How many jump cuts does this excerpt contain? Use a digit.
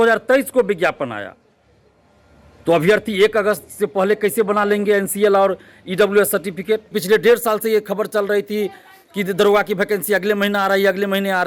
1